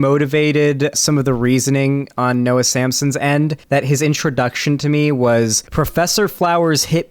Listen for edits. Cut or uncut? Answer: cut